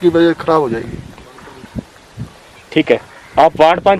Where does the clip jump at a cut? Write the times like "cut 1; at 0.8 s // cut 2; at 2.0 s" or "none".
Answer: none